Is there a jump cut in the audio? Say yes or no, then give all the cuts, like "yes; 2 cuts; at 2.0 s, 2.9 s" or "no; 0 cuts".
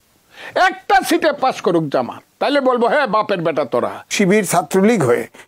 yes; 1 cut; at 4.1 s